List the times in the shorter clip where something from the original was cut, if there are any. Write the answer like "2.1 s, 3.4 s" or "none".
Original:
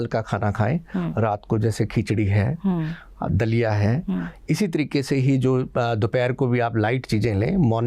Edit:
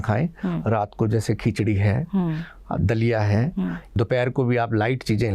3.9 s

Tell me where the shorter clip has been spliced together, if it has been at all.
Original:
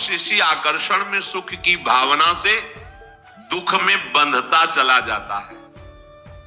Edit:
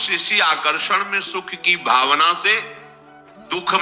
none

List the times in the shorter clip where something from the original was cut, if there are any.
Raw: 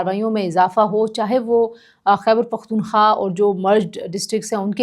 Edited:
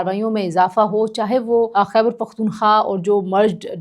1.7 s

